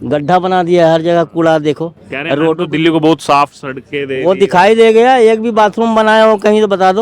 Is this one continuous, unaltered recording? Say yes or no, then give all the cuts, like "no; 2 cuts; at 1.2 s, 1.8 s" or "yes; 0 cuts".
yes; 0 cuts